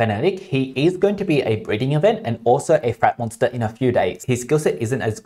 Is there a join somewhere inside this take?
yes; 1 cut; at 4.2 s

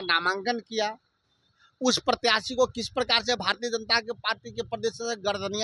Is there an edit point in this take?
no; 0 cuts

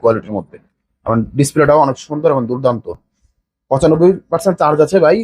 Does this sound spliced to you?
no; 0 cuts

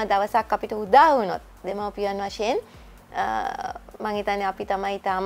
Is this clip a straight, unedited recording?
yes; 0 cuts

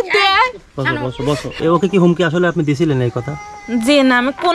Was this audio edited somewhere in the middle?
yes; 1 cut; at 1.5 s

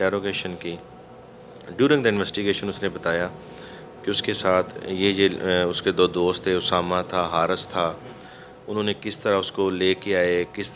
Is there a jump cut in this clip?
no; 0 cuts

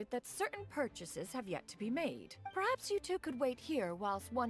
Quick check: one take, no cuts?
yes; 0 cuts

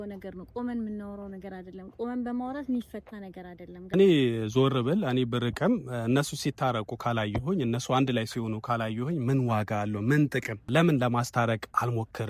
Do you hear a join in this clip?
yes; 2 cuts; at 3.9 s, 10.6 s

